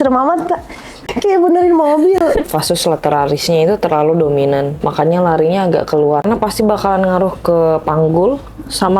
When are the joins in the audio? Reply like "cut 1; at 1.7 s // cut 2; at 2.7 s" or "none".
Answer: cut 1; at 1.1 s // cut 2; at 6.2 s